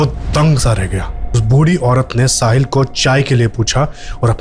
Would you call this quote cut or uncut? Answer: cut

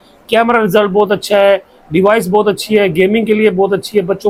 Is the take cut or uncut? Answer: uncut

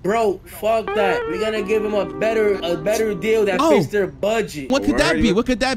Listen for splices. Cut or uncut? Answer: cut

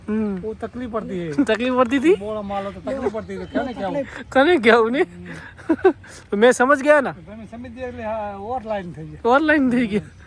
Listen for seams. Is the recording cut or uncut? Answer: uncut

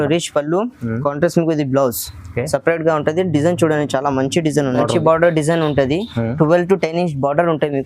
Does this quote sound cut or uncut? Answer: cut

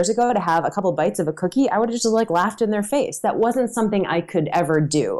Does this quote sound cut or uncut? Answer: uncut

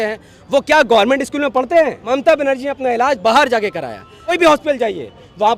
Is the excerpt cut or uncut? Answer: cut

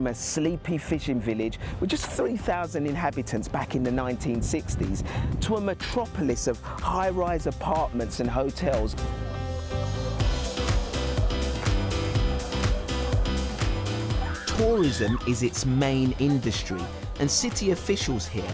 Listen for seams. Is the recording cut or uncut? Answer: uncut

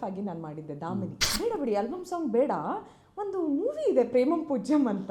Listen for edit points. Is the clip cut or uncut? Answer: cut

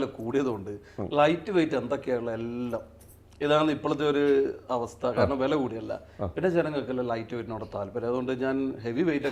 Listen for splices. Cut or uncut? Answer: uncut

